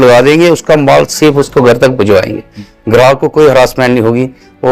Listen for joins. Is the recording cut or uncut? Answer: uncut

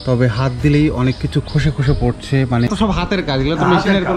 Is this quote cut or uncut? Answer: cut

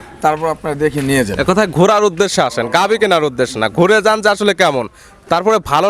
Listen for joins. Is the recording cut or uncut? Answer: uncut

